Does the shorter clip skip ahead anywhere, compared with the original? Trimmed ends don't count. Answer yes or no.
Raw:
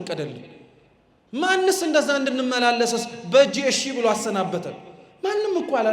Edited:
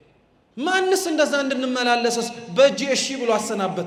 no